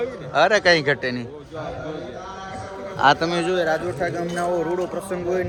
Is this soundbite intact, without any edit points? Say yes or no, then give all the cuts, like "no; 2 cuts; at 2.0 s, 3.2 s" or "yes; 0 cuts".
yes; 0 cuts